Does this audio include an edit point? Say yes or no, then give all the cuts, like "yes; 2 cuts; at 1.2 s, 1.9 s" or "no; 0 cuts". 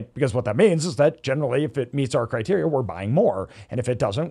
no; 0 cuts